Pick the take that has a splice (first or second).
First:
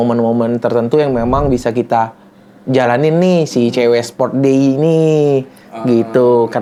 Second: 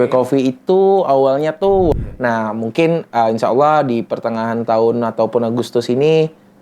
second